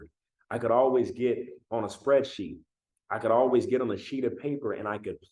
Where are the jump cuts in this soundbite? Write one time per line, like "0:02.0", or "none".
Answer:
none

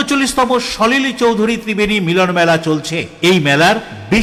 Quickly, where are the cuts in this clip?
none

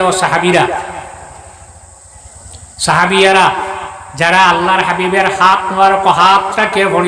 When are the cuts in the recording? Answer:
none

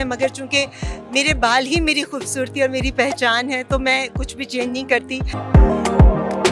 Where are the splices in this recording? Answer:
0:05.2

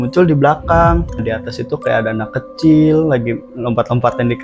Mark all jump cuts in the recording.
0:01.2

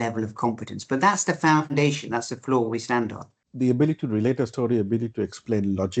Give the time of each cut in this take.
0:03.4

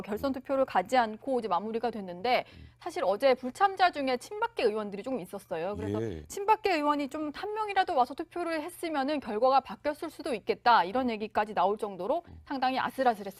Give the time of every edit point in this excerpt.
none

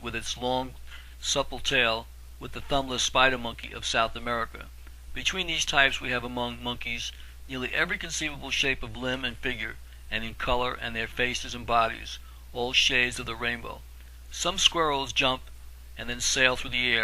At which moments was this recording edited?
none

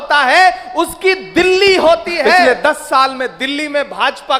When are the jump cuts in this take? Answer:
0:02.4

